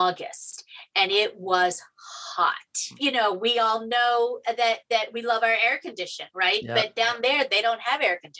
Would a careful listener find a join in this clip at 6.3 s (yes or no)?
no